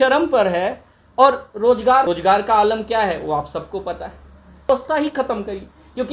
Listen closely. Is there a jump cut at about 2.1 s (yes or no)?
yes